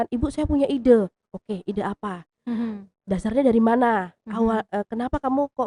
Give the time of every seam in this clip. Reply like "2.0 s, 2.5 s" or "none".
none